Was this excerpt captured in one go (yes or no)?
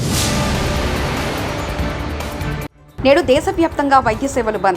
no